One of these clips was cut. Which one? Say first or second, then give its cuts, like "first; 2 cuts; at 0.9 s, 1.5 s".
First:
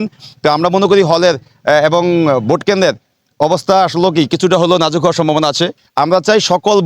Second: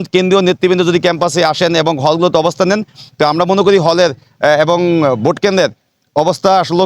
first; 1 cut; at 5.8 s